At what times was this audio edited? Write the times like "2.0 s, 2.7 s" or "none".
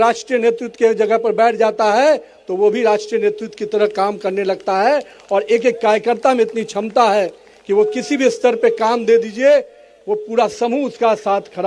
none

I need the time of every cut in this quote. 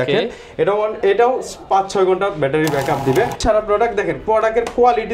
3.4 s

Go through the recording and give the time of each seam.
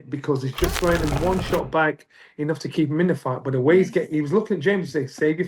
none

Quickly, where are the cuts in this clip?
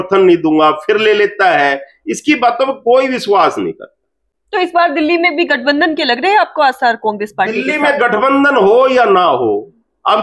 none

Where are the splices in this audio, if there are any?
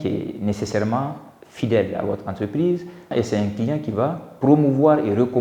3.1 s

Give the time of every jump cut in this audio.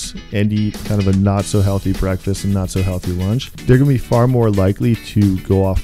0.8 s, 3.5 s

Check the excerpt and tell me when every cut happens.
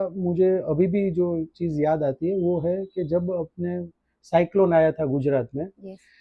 none

